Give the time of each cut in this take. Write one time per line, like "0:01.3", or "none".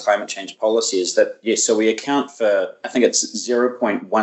none